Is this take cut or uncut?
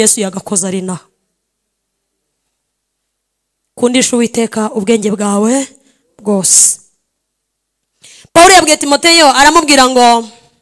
uncut